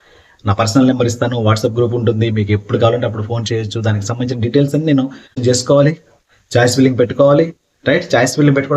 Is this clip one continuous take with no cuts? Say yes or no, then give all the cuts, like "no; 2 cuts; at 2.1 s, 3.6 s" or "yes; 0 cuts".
no; 1 cut; at 5.4 s